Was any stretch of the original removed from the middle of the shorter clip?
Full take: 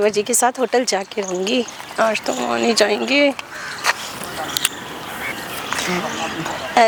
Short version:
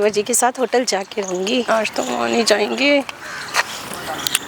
yes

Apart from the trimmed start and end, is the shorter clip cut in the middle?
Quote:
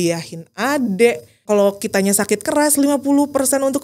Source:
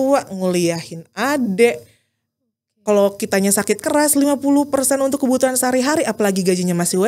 yes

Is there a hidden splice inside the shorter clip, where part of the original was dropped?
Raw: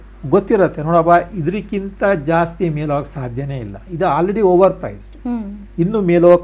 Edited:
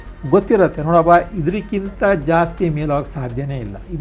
no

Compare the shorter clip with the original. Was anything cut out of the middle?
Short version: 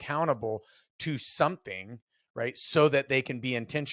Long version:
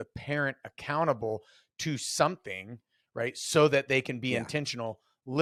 no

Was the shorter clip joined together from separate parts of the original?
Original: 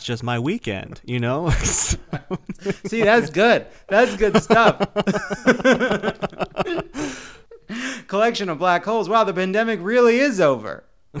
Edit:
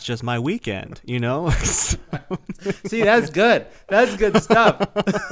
no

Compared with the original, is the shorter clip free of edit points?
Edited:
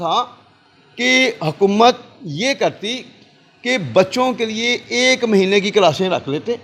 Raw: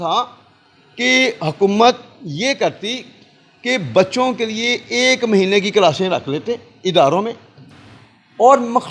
yes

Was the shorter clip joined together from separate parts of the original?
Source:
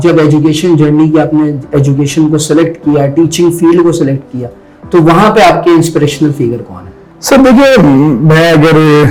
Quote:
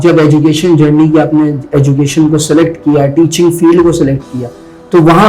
no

